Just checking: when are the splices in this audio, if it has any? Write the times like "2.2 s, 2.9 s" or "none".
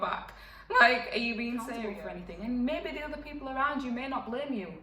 1.7 s